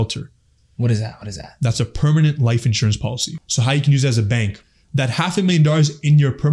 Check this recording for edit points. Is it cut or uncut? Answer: cut